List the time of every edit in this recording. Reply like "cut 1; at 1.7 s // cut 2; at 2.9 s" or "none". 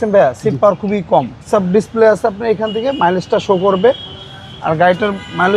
cut 1; at 1.4 s